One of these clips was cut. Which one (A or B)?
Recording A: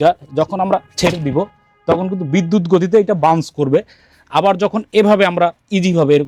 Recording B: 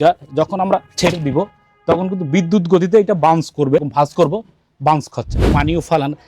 B